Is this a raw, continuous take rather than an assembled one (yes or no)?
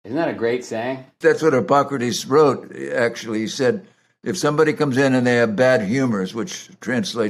no